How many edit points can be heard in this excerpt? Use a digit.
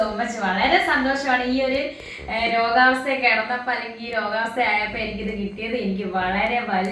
0